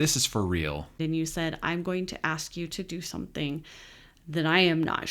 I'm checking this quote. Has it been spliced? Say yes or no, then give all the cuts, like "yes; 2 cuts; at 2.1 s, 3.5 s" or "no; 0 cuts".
yes; 1 cut; at 1.0 s